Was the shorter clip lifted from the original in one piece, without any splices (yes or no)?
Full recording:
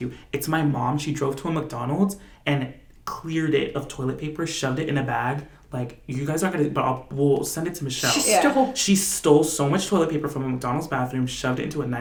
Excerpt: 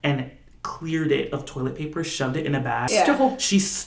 no